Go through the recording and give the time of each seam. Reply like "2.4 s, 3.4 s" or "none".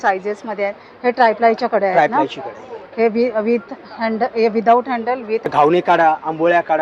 5.5 s